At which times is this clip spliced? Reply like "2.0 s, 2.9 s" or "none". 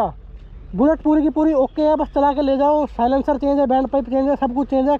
none